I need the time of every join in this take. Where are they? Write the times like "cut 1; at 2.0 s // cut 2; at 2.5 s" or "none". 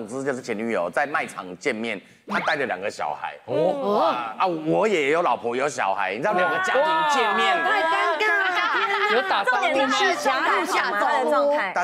none